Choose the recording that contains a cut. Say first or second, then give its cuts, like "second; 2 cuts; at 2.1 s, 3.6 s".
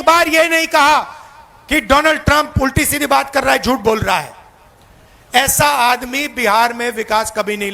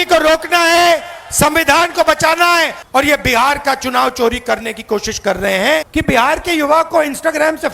second; 2 cuts; at 2.8 s, 5.9 s